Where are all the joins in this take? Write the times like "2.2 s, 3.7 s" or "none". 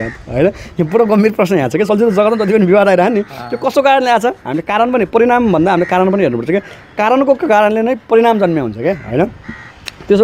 none